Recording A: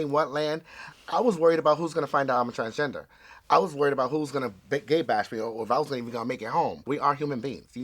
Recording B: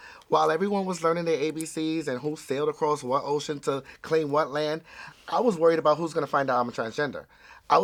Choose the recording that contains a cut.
A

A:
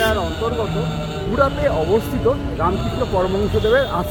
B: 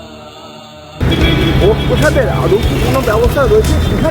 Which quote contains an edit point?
B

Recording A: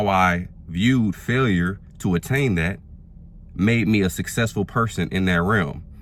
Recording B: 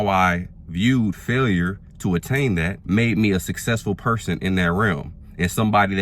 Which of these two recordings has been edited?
B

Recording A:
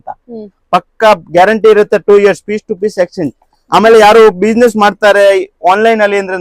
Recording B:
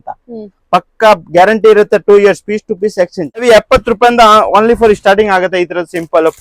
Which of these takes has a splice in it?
B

